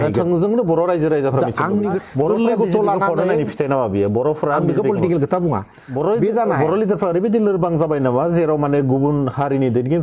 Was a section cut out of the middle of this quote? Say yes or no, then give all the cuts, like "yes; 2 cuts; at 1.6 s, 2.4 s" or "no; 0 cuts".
yes; 2 cuts; at 2.0 s, 5.9 s